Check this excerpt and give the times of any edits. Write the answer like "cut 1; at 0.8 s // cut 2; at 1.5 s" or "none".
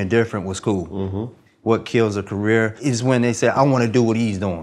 cut 1; at 1.4 s // cut 2; at 2.8 s